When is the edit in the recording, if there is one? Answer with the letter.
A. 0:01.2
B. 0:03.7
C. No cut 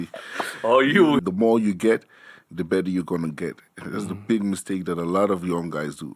A